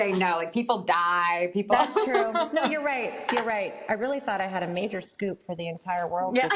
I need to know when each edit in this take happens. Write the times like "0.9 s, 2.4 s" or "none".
none